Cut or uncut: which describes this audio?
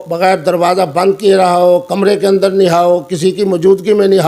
uncut